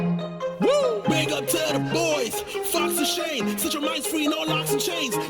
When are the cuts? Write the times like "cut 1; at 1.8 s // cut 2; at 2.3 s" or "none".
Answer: cut 1; at 2.7 s